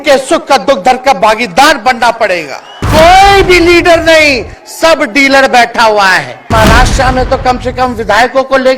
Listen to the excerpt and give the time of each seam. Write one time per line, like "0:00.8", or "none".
0:02.8
0:06.5